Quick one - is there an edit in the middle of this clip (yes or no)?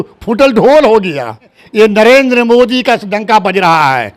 yes